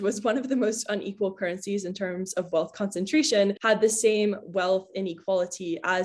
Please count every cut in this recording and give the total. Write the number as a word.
zero